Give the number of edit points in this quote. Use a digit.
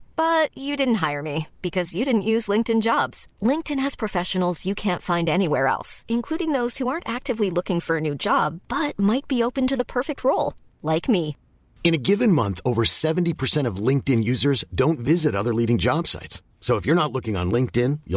0